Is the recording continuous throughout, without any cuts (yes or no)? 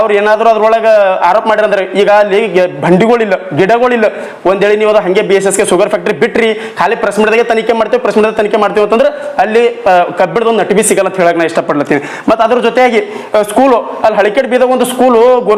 yes